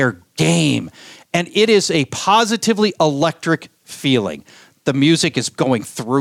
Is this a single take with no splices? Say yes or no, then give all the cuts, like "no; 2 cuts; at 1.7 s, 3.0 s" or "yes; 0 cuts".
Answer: yes; 0 cuts